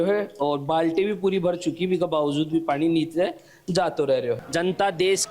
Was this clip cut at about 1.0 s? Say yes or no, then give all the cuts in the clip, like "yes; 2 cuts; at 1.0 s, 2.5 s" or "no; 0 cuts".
no; 1 cut; at 4.4 s